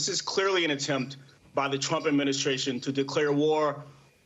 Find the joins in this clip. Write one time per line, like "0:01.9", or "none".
none